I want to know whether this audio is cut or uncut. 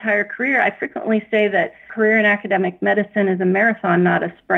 cut